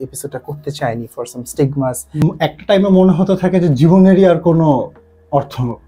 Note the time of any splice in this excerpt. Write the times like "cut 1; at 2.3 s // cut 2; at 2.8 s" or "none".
cut 1; at 2.2 s